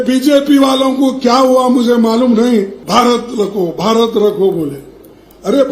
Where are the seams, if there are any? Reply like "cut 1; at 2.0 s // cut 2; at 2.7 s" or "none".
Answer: cut 1; at 2.8 s